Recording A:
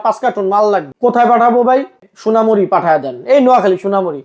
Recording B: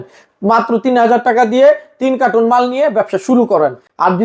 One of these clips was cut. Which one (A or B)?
A